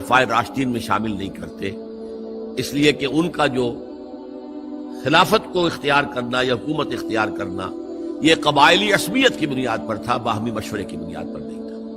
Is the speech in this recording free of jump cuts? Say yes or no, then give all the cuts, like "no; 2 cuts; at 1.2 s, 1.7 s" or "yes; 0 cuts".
no; 1 cut; at 11.0 s